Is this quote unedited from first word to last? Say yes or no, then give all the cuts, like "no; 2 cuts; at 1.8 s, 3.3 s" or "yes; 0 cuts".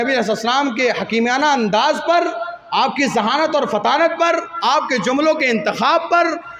yes; 0 cuts